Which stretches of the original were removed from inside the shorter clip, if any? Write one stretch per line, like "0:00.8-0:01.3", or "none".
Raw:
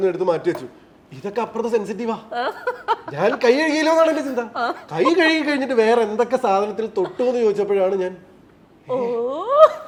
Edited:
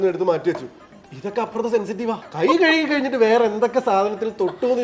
0:02.3-0:04.8